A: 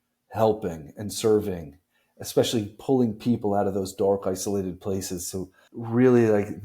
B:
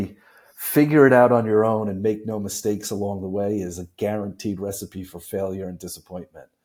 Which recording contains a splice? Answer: A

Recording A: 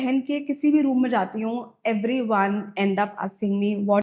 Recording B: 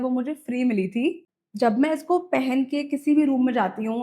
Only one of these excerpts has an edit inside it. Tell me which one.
B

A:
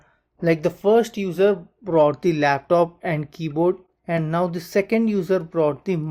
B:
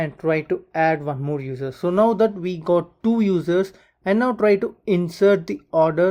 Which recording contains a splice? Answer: A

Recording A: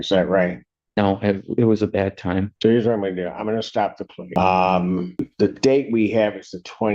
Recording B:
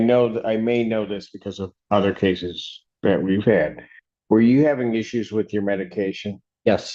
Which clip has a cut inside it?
A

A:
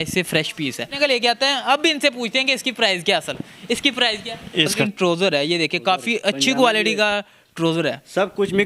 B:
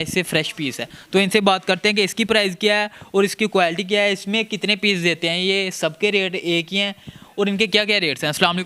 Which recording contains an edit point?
A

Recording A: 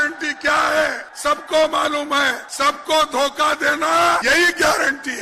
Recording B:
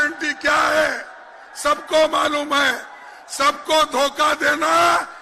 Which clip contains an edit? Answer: A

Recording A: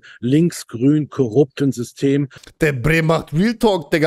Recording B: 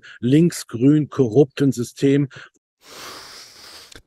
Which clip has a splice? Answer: A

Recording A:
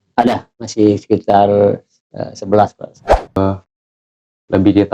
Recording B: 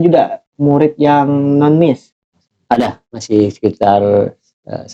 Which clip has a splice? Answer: A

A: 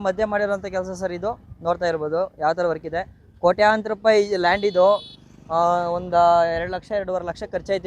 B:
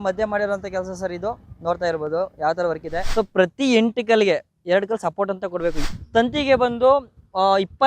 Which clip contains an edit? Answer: B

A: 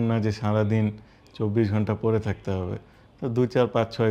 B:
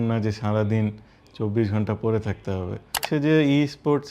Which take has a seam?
B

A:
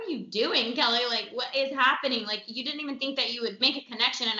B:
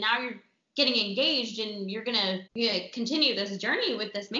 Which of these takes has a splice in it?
B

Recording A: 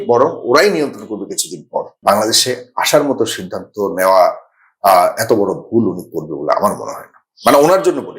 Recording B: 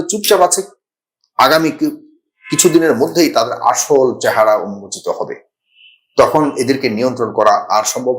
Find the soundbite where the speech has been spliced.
A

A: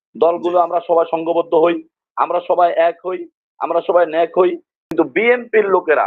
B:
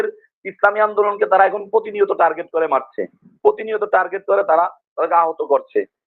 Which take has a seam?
A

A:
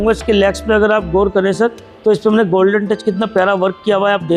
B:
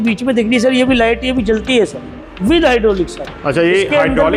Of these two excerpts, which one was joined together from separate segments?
B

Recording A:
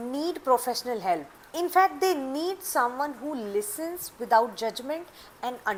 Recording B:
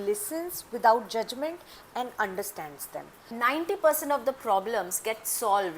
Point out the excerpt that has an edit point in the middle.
B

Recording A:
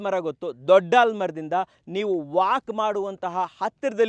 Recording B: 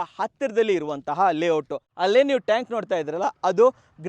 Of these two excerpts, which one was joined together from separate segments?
B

